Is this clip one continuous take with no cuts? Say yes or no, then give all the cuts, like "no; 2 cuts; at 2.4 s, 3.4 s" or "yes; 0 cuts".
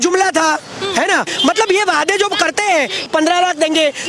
yes; 0 cuts